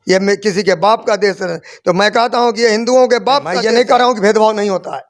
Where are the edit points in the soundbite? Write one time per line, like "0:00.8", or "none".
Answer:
0:03.5